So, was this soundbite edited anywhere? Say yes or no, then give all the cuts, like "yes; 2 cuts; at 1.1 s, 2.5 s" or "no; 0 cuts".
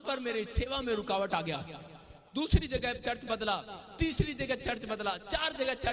no; 0 cuts